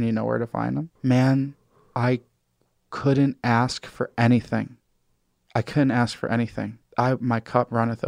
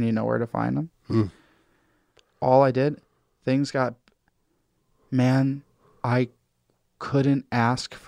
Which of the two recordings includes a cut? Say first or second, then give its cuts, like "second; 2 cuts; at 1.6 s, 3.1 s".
first; 2 cuts; at 0.9 s, 6.8 s